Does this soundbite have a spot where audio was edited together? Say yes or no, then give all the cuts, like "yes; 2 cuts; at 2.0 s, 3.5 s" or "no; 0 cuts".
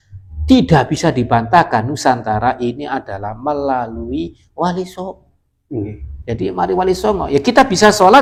no; 0 cuts